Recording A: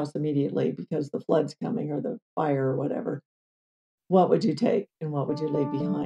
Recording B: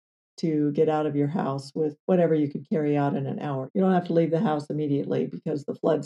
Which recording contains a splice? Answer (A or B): B